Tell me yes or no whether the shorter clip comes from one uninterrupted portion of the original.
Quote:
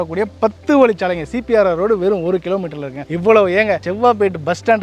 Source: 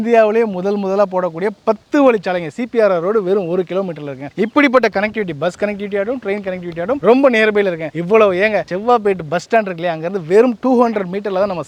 no